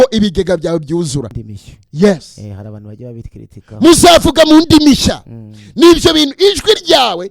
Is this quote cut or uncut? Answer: cut